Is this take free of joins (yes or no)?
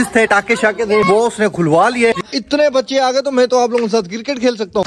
no